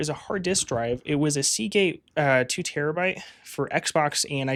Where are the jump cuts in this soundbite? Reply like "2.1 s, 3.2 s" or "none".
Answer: none